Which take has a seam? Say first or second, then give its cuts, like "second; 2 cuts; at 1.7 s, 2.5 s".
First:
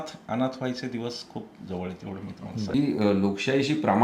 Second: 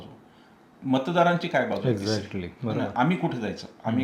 first; 1 cut; at 2.7 s